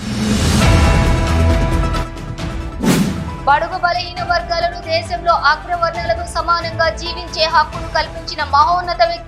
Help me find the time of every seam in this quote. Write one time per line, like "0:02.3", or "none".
0:01.6
0:03.3